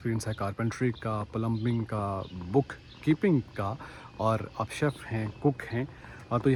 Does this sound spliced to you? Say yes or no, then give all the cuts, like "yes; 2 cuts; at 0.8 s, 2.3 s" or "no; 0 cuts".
no; 0 cuts